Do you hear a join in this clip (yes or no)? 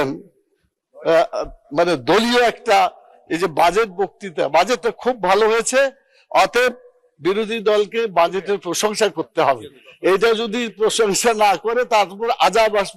no